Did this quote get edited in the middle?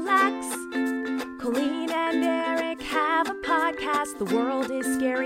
no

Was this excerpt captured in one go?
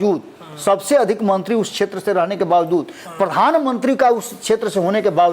yes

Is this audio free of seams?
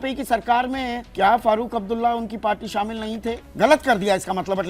no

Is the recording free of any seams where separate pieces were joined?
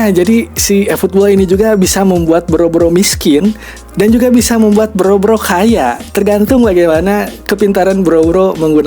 yes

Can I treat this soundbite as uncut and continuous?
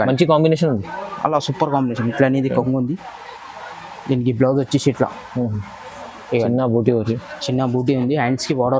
yes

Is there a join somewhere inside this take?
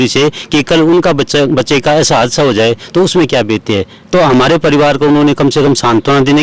no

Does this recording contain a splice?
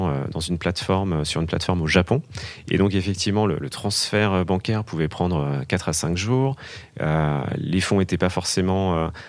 no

